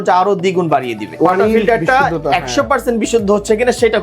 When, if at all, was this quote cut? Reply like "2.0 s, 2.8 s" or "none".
1.0 s